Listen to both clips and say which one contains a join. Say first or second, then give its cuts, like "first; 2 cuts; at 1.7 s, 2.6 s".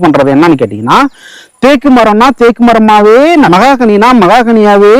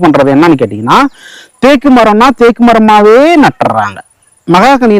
first; 1 cut; at 3.5 s